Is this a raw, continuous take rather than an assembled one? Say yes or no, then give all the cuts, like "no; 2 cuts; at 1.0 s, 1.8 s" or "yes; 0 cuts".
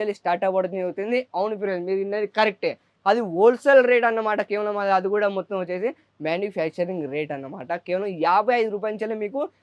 yes; 0 cuts